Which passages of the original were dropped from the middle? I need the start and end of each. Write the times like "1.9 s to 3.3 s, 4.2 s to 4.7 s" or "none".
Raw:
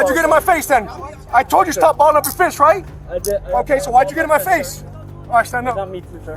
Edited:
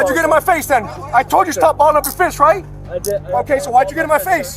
1.0 s to 1.2 s